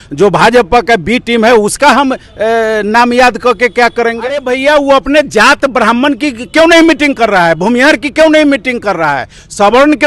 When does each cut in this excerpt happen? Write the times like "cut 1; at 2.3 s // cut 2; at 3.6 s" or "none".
cut 1; at 4.4 s